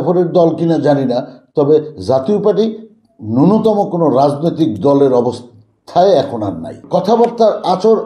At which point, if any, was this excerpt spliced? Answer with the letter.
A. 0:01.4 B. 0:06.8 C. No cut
B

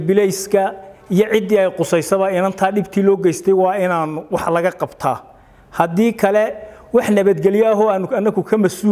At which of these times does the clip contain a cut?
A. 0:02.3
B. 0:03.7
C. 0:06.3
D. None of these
D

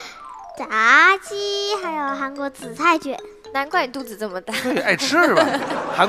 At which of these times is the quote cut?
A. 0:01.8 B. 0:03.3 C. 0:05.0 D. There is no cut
C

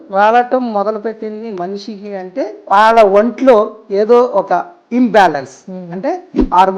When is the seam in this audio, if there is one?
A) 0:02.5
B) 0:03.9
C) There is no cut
A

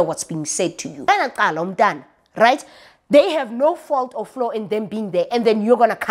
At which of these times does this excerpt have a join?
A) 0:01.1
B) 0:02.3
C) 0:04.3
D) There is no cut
A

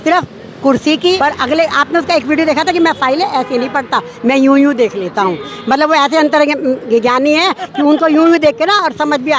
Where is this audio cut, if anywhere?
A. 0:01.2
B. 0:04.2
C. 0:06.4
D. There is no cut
A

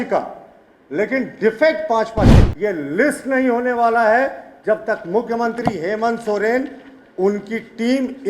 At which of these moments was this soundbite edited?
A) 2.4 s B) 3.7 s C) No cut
A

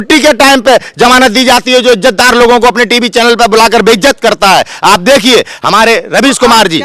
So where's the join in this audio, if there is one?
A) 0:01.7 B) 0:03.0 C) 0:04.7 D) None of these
D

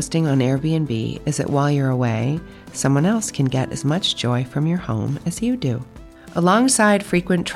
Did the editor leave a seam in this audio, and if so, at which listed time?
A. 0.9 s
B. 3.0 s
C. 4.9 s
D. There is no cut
D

